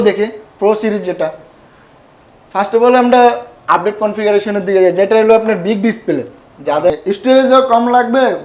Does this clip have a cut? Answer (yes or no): yes